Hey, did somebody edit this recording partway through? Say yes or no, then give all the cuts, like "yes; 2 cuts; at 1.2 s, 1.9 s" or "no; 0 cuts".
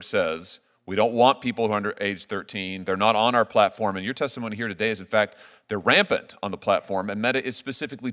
no; 0 cuts